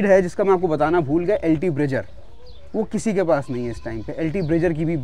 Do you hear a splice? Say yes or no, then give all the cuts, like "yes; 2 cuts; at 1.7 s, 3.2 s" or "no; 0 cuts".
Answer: no; 0 cuts